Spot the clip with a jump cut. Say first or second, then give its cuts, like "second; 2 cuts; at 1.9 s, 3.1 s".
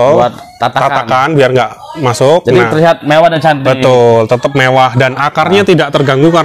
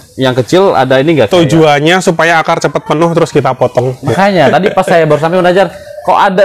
second; 1 cut; at 4.0 s